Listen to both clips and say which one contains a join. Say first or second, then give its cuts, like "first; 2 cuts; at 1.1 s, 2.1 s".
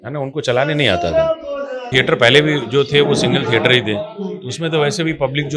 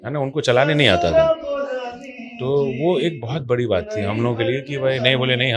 first; 1 cut; at 1.9 s